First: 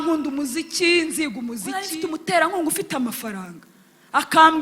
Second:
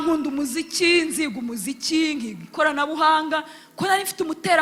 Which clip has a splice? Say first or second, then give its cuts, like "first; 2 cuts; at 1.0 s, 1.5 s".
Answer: first; 1 cut; at 1.8 s